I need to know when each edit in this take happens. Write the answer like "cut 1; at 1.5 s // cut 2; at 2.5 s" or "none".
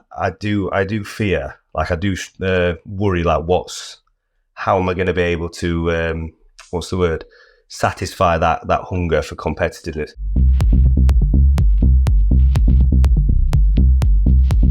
cut 1; at 10.2 s